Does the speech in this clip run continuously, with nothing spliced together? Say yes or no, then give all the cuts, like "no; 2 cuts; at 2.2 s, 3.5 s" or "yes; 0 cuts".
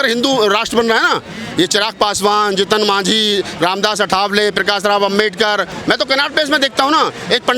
no; 1 cut; at 5.7 s